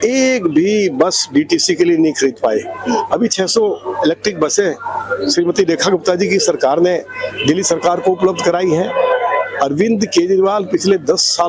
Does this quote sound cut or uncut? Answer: uncut